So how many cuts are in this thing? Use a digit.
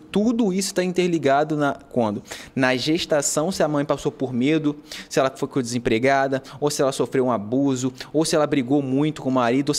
0